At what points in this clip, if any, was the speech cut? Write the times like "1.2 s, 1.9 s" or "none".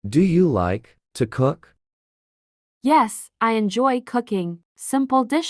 none